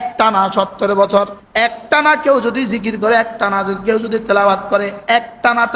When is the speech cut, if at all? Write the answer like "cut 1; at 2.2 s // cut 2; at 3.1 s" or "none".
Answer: cut 1; at 1.4 s